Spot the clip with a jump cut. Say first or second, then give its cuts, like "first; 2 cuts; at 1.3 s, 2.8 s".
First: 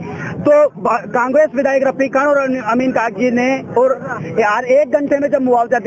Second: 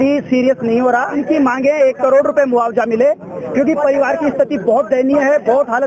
second; 1 cut; at 1.2 s